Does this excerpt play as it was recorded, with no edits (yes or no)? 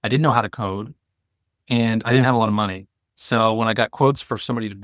yes